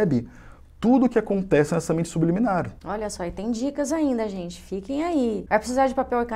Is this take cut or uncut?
cut